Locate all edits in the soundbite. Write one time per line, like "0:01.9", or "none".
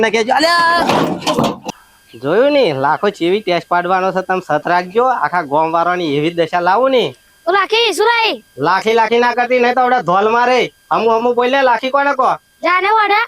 0:01.8